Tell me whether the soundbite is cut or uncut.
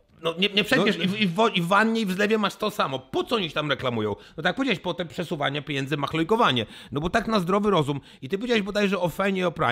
uncut